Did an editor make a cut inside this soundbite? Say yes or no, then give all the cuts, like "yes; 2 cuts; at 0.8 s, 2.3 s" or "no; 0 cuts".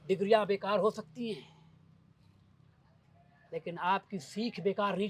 no; 0 cuts